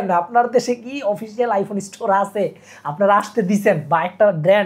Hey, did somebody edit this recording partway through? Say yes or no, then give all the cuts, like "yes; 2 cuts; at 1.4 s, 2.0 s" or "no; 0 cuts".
no; 0 cuts